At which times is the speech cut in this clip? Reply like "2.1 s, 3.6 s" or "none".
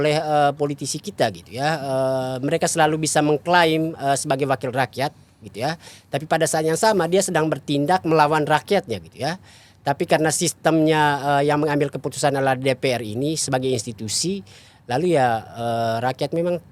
none

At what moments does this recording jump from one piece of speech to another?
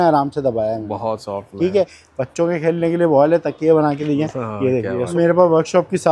2.0 s, 5.1 s

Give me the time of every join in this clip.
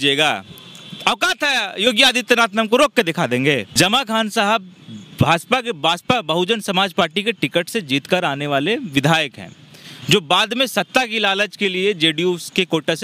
3.7 s

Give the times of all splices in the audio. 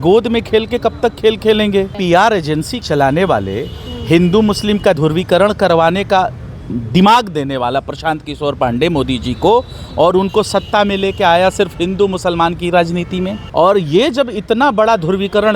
2.0 s, 2.8 s, 5.0 s, 13.4 s

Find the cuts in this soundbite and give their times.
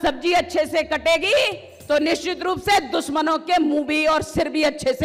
none

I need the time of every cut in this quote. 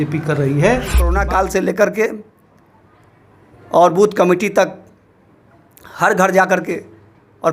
1.1 s

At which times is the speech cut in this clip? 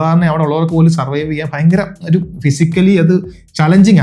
none

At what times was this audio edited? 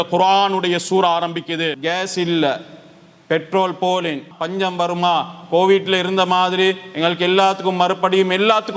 1.7 s, 4.3 s

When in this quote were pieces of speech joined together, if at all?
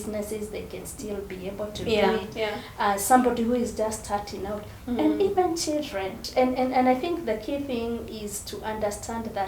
6.2 s

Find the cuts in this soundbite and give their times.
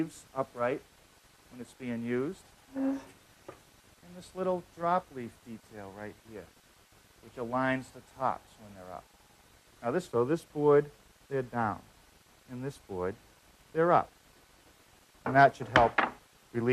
none

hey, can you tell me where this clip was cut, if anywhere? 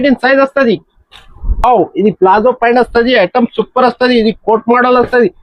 none

